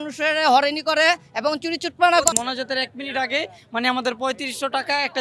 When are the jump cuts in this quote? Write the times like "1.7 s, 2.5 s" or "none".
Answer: 2.3 s